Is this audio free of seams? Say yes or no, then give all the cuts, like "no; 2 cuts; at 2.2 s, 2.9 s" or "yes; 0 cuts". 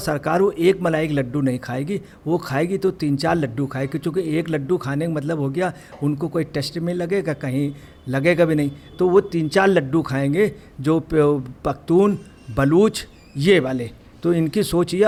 yes; 0 cuts